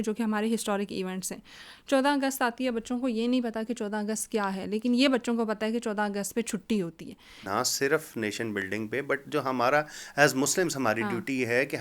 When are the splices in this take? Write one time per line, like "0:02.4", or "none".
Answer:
0:07.4